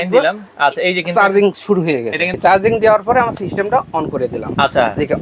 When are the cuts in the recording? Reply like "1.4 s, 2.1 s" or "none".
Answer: 2.3 s